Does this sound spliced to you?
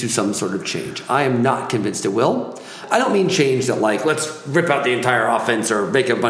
yes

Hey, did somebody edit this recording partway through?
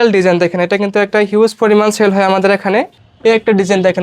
yes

